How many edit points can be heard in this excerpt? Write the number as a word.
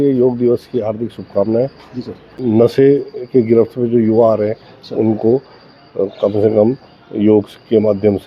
one